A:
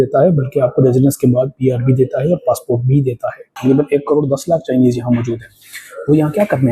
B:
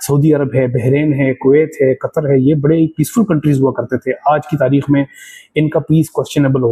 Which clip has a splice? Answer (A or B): A